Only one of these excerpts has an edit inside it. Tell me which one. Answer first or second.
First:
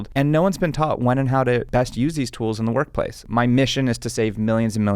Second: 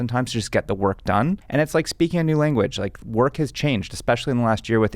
first